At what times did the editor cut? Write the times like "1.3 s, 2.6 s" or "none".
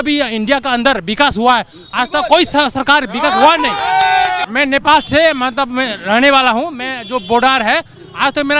4.4 s

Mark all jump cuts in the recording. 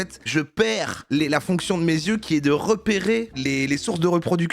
3.3 s

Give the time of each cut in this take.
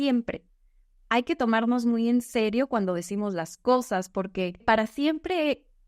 4.6 s

